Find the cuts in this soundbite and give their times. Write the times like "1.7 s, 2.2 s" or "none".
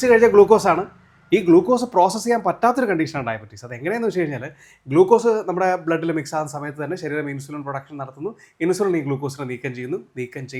none